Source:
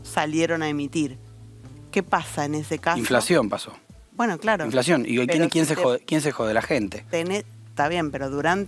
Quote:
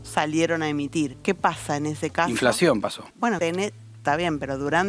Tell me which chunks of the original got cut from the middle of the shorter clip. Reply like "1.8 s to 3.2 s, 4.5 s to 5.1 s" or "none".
1.2 s to 1.8 s, 3.9 s to 7.0 s